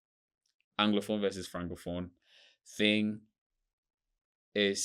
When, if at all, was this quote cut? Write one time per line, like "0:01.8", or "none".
none